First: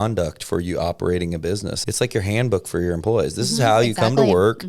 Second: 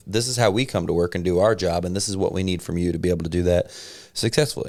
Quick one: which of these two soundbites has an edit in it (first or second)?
first